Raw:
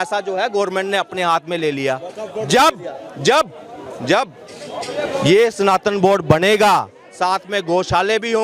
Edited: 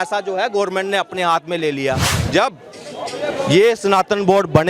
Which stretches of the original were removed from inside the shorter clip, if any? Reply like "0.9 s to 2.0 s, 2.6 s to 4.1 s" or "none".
2.1 s to 3.9 s